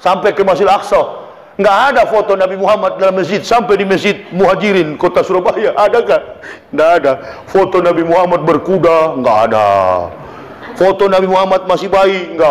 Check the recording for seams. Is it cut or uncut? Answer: uncut